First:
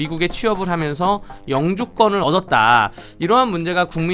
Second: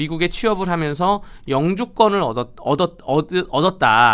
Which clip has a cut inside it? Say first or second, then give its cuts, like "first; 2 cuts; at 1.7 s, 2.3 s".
first; 1 cut; at 2.2 s